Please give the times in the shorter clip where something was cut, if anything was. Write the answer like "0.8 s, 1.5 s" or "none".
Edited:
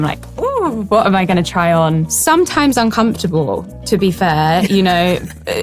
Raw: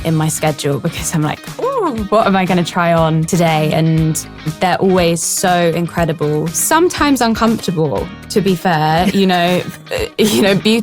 2.1 s